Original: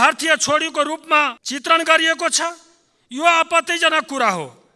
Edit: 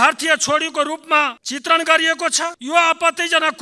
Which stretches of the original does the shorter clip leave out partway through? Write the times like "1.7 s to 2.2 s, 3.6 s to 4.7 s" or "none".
2.6 s to 3.1 s

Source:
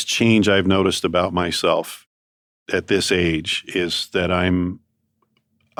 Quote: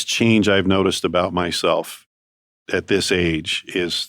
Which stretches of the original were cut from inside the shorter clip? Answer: none

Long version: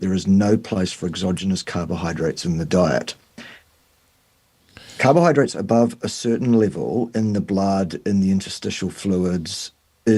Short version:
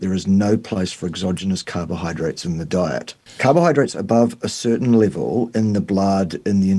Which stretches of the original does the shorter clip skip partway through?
3.2 s to 4.8 s

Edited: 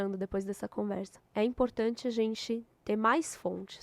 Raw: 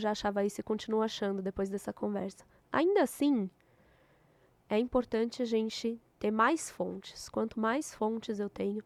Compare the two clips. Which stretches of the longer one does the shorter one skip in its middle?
2.4 s to 4.5 s

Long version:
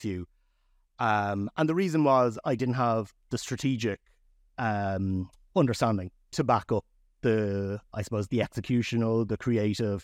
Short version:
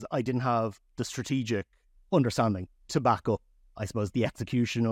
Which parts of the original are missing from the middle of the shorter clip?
4.3 s to 5.4 s, 7.1 s to 7.8 s

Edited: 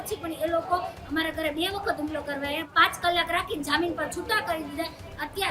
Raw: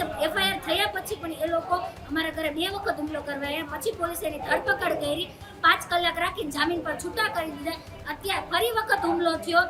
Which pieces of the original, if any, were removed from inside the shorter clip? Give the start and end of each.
3.7 s to 5.5 s

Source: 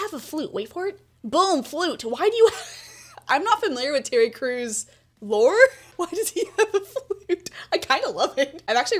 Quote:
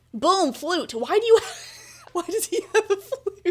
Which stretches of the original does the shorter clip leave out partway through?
3.1 s to 5.8 s

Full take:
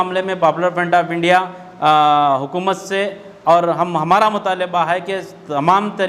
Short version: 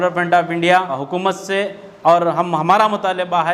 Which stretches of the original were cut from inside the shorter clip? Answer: 1.6 s to 2.5 s

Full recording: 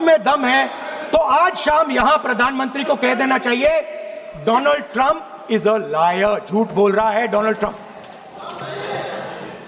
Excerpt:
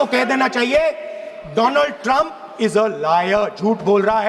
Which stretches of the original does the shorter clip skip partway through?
none

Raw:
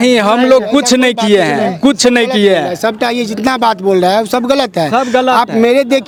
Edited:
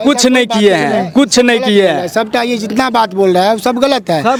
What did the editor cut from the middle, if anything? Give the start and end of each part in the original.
none

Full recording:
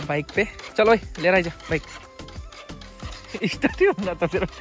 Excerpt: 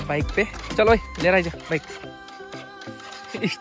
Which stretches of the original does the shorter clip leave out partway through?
none

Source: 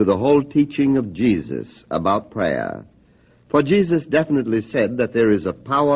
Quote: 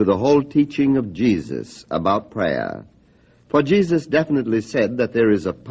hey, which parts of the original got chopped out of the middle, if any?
none

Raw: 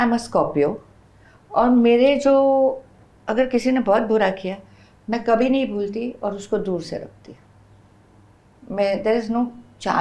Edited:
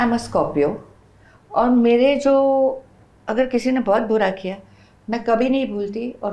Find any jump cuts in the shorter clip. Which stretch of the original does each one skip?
none

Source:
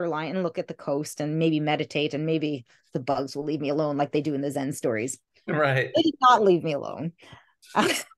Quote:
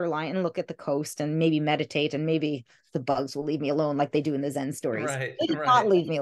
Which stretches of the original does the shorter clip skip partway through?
5.2 s to 5.7 s

